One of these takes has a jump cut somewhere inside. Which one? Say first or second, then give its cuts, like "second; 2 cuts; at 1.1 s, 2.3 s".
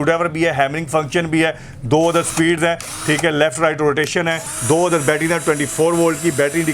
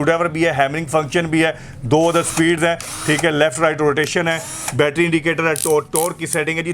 first; 1 cut; at 4.5 s